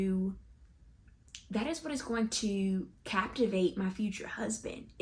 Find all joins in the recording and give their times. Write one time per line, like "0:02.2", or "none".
none